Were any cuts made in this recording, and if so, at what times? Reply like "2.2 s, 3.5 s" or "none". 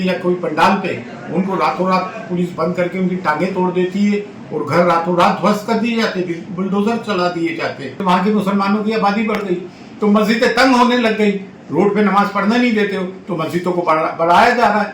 8.0 s